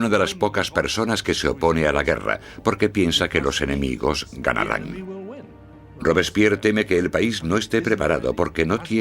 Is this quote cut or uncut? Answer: cut